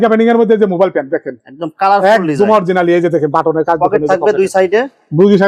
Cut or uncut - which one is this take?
uncut